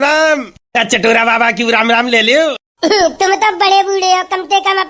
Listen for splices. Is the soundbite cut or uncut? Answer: uncut